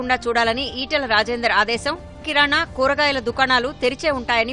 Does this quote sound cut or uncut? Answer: uncut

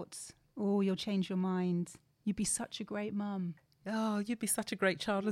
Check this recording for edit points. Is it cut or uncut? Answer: cut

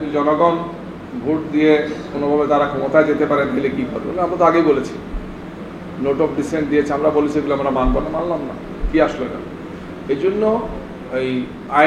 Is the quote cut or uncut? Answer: uncut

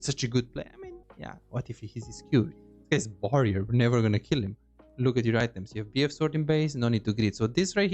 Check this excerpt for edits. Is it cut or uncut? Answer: cut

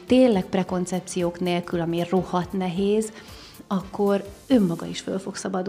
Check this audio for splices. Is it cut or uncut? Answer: uncut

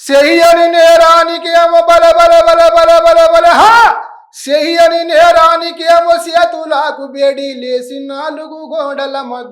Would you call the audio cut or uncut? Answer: uncut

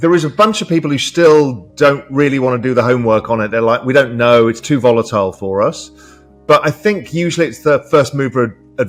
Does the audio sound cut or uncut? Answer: uncut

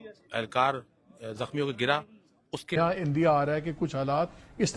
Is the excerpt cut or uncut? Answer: cut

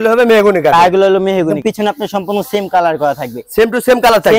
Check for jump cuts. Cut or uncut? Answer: cut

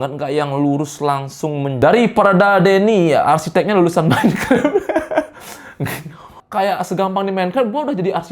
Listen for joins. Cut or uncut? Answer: cut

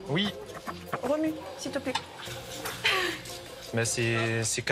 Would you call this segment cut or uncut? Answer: uncut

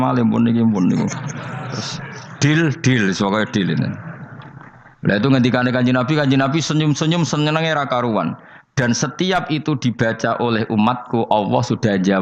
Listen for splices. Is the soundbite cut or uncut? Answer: uncut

